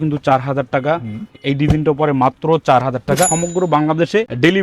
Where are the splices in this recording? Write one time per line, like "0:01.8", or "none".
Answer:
0:03.3